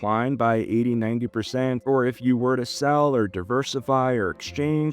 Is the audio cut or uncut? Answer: cut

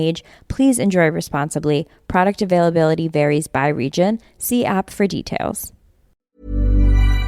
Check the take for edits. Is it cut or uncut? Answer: cut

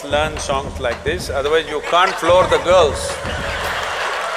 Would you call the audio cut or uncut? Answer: uncut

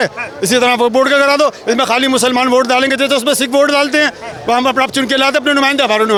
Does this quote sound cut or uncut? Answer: uncut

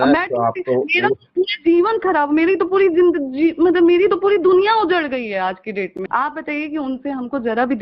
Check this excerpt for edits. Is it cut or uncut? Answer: cut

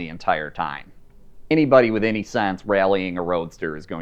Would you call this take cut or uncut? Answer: cut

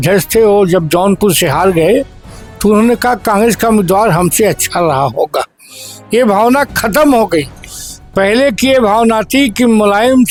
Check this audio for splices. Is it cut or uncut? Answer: uncut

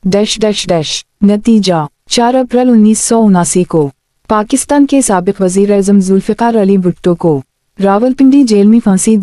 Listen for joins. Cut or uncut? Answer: cut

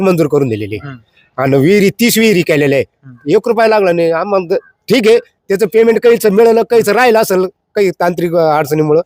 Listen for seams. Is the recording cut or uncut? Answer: uncut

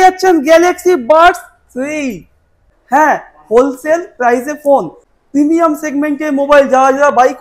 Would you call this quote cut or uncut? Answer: cut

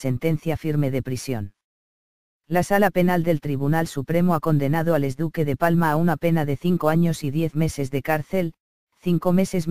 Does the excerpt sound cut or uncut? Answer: uncut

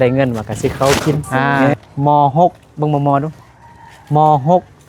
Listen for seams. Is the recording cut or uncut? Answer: cut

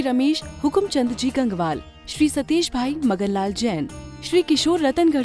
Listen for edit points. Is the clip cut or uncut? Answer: uncut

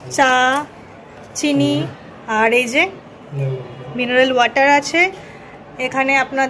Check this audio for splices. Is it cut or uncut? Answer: uncut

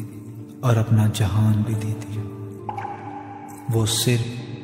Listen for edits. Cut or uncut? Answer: uncut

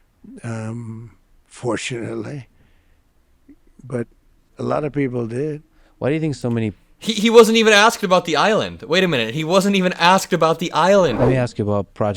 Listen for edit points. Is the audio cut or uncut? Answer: cut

